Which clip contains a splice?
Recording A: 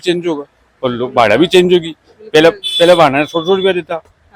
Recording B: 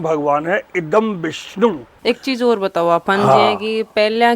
B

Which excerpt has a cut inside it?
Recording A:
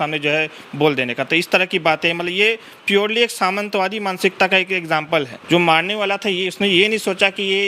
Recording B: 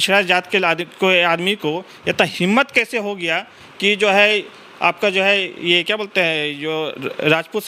A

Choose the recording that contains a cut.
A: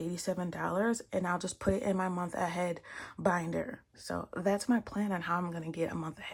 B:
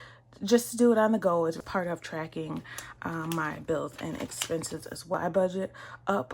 B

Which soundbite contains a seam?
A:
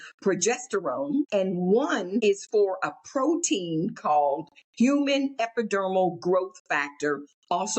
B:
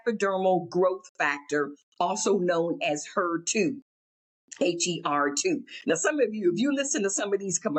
A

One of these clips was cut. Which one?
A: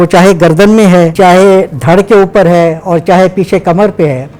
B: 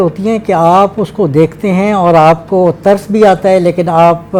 A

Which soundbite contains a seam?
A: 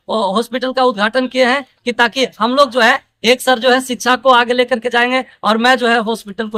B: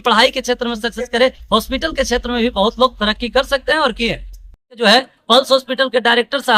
B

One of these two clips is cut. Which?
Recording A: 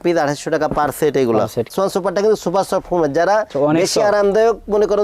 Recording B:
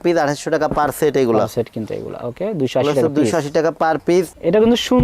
A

